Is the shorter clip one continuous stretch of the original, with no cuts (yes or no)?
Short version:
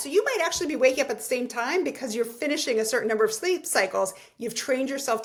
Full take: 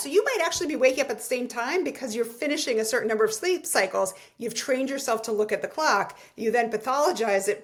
yes